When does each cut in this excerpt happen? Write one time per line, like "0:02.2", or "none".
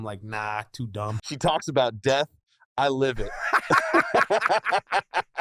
0:01.2